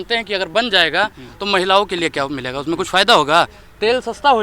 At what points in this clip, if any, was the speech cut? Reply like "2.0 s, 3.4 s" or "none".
none